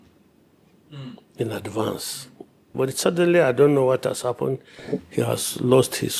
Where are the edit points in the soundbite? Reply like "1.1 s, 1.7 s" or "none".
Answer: 2.7 s